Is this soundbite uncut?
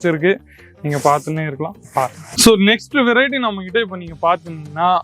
no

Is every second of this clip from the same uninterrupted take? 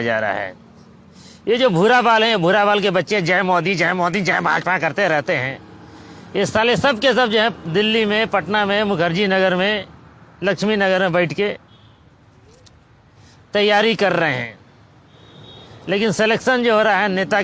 yes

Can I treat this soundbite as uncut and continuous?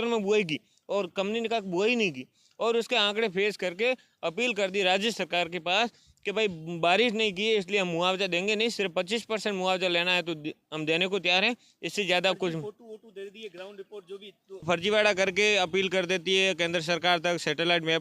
no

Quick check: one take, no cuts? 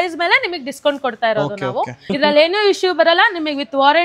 no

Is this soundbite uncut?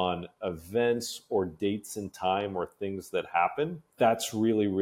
no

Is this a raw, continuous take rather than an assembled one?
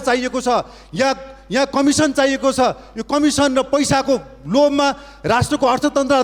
yes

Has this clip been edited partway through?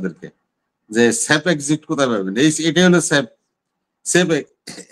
no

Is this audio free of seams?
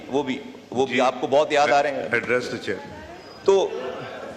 yes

